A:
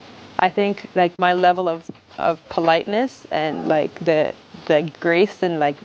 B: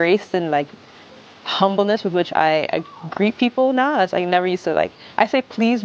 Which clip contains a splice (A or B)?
A